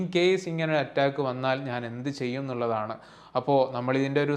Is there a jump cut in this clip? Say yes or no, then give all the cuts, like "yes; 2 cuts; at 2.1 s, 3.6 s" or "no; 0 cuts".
no; 0 cuts